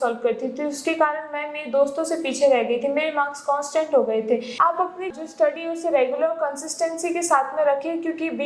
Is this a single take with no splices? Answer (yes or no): no